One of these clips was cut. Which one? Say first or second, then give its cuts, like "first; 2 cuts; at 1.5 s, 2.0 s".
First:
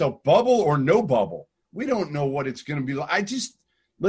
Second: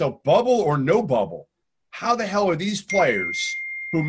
first; 1 cut; at 1.6 s